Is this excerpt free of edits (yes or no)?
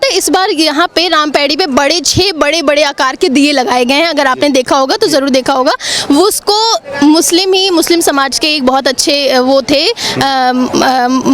yes